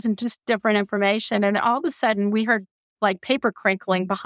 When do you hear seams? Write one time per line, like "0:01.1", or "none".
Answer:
0:02.8